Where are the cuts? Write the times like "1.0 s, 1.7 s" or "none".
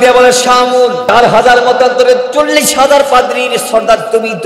1.1 s